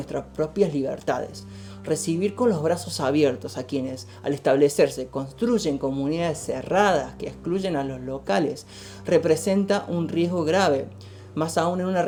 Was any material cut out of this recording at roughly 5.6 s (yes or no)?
no